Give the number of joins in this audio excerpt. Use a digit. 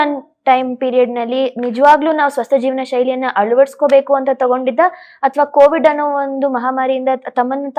0